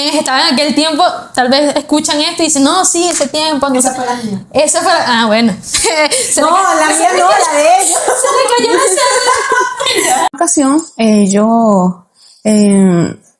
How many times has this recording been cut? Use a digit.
1